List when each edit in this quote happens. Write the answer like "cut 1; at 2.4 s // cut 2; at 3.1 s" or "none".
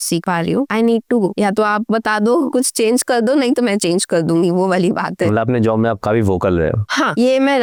none